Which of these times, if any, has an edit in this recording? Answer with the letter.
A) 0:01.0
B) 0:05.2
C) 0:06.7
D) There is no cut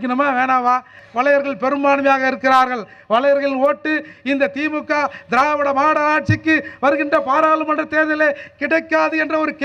A